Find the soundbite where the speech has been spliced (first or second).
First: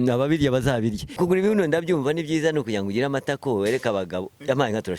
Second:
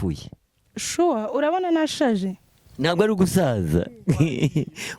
first